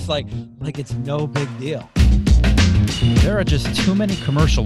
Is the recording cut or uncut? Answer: cut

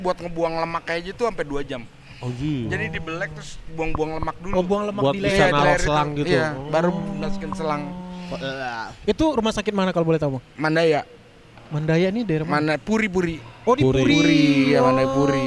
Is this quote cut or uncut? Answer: uncut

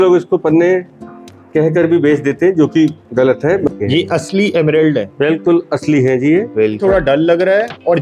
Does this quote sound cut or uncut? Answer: cut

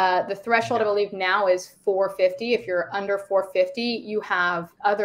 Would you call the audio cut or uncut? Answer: uncut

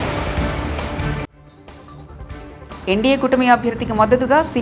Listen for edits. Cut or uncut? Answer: cut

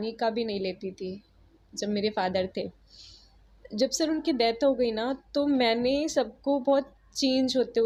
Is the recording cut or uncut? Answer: uncut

